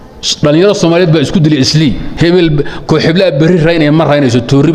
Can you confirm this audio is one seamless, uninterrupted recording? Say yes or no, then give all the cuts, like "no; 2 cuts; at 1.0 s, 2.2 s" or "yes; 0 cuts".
no; 1 cut; at 2.1 s